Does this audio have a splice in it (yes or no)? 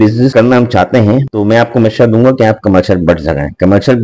no